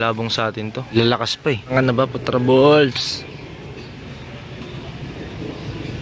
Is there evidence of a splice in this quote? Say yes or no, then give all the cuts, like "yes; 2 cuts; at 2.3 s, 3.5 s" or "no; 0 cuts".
yes; 2 cuts; at 0.9 s, 1.7 s